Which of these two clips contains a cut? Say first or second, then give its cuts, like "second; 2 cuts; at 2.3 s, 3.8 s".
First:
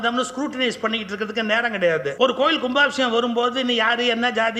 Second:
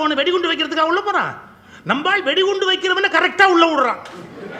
first; 1 cut; at 2.1 s